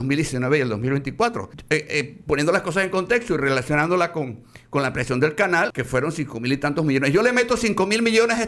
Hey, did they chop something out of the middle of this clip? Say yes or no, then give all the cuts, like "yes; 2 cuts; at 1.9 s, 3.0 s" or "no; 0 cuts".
yes; 2 cuts; at 1.5 s, 5.8 s